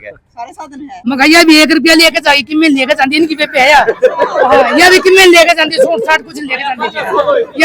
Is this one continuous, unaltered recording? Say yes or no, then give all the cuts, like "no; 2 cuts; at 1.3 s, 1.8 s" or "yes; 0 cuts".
no; 1 cut; at 1.0 s